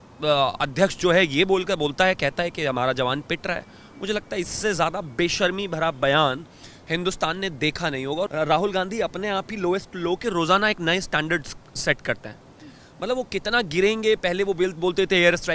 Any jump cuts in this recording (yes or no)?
yes